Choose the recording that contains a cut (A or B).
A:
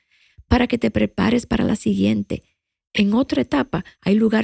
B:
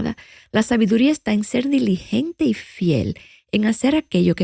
A